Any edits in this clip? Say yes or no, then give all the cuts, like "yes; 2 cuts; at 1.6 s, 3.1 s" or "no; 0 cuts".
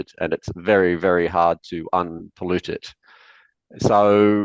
no; 0 cuts